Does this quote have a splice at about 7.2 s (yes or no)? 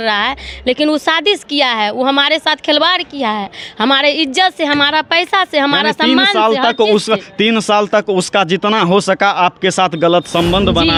no